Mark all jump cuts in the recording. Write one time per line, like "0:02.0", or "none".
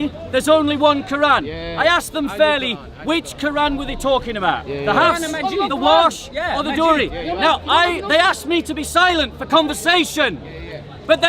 none